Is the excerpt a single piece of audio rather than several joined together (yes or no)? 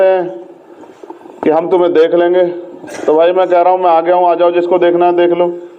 yes